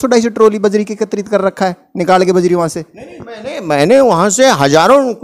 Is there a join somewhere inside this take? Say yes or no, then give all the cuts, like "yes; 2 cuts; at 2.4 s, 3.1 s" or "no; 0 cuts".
no; 0 cuts